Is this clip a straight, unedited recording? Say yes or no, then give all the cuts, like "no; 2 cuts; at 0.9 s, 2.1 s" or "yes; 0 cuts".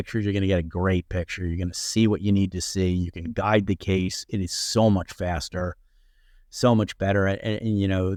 yes; 0 cuts